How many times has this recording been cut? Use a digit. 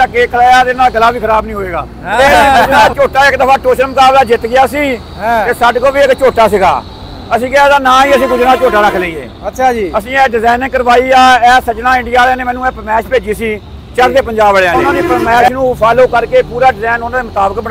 2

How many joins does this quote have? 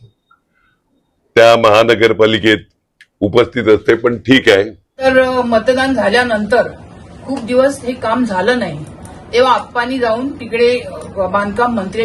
1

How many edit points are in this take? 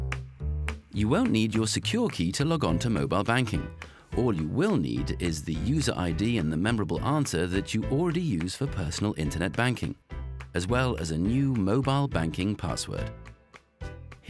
1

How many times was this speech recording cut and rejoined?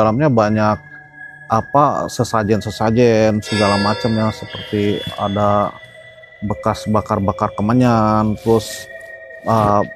0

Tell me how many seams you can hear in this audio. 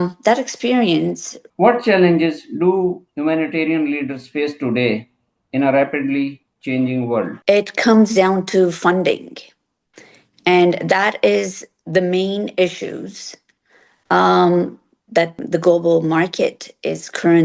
2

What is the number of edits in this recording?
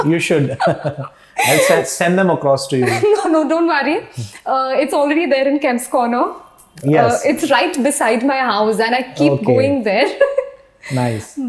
0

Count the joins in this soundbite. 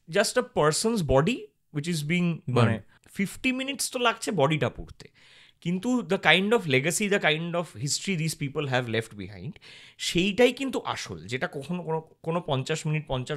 1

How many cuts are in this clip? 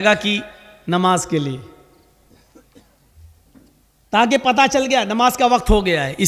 0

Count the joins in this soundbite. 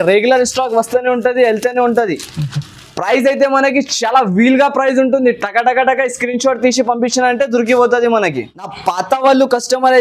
1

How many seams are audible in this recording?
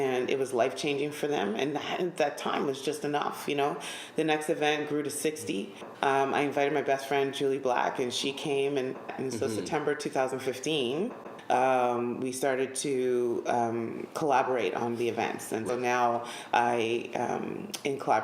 4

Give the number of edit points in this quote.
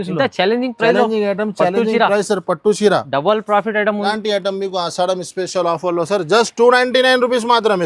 1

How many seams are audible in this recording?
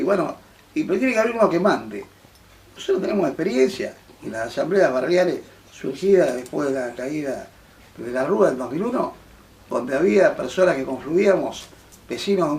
1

